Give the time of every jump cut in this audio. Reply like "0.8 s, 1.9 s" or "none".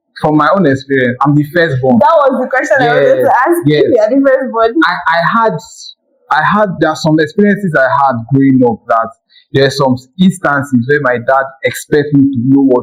none